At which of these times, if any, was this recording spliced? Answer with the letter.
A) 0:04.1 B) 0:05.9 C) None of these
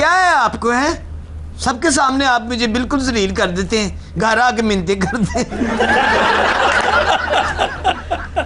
C